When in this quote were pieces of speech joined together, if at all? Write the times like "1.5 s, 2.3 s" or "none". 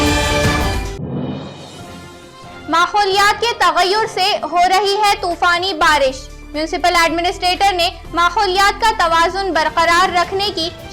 2.2 s